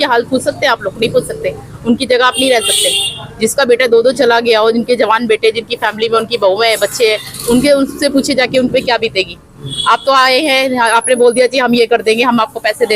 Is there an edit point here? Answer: no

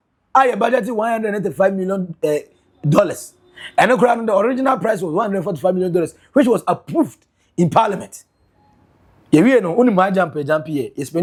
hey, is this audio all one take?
yes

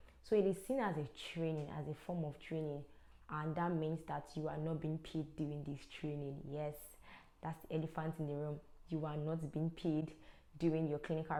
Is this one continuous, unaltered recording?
yes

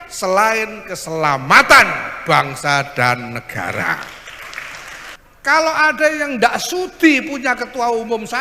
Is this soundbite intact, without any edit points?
no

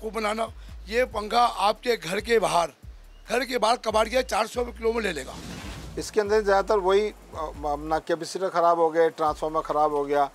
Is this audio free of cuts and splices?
no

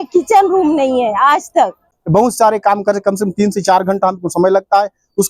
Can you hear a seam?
yes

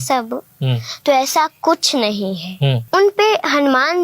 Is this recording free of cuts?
no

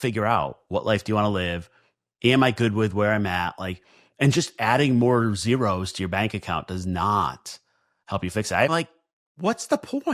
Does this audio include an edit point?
yes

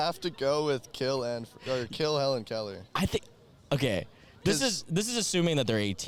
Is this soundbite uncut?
yes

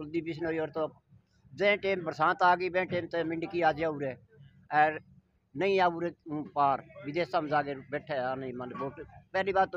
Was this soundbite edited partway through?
no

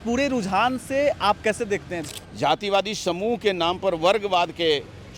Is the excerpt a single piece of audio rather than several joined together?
no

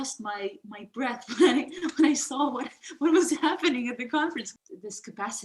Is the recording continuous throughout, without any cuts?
no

